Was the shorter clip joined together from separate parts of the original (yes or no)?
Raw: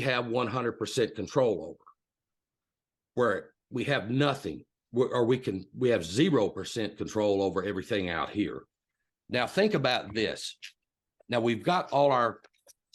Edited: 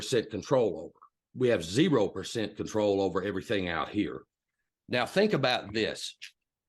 yes